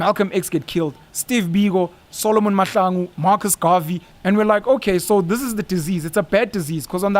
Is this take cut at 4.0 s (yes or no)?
yes